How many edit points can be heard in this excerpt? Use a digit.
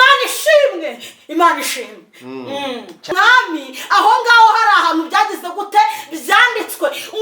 1